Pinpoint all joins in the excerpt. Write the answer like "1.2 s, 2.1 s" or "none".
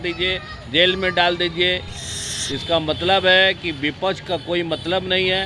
none